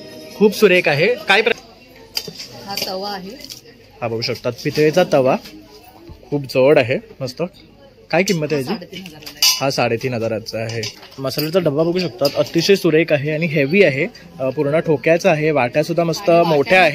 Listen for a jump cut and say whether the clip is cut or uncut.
cut